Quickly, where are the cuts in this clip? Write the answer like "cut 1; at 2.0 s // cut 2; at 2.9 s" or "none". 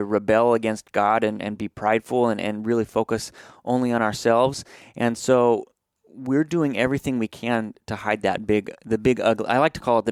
none